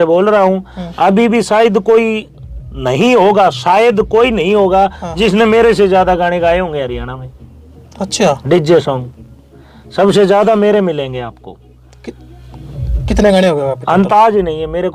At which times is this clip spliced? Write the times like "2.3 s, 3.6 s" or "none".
none